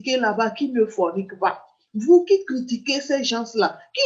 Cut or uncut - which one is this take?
uncut